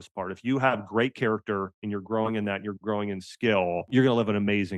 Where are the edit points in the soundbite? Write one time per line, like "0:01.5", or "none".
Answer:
0:03.9